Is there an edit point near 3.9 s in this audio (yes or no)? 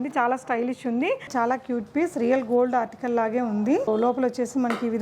yes